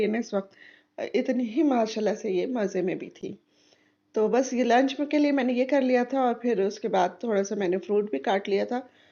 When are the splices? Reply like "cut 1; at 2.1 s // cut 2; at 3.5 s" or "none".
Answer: none